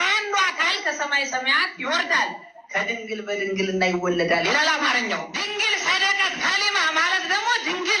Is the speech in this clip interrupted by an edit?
yes; 1 cut; at 5.4 s

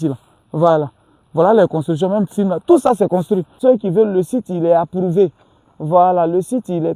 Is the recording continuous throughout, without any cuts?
no; 1 cut; at 3.6 s

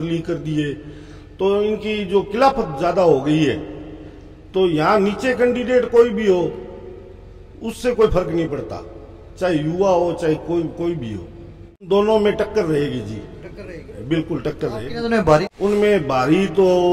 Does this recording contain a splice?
yes; 2 cuts; at 11.9 s, 15.5 s

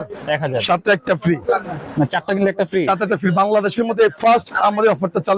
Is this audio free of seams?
yes; 0 cuts

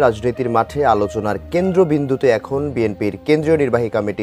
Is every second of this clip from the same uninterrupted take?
yes; 0 cuts

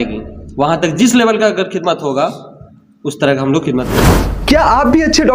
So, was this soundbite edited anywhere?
yes; 1 cut; at 4.2 s

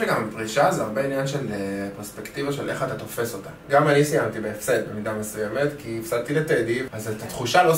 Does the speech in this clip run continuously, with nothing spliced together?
no; 2 cuts; at 3.6 s, 6.9 s

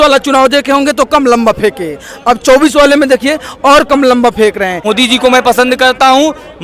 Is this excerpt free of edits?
no; 1 cut; at 4.8 s

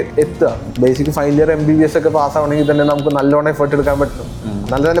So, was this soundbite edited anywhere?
no; 0 cuts

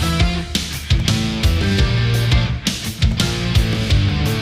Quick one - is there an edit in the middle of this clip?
no; 0 cuts

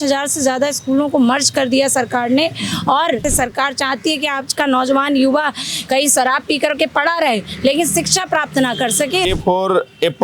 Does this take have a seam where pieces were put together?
yes; 2 cuts; at 3.2 s, 9.3 s

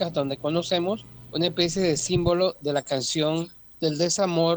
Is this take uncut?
no; 2 cuts; at 1.2 s, 3.6 s

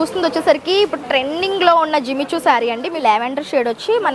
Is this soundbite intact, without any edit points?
no; 1 cut; at 3.0 s

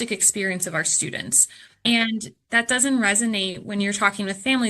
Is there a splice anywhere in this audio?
yes; 1 cut; at 1.8 s

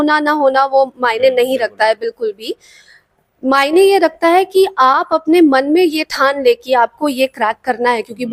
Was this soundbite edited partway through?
no; 0 cuts

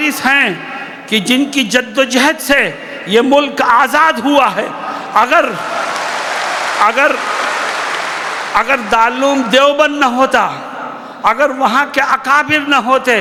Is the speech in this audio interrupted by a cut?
no; 0 cuts

